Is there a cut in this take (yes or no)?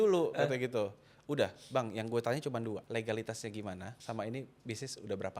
yes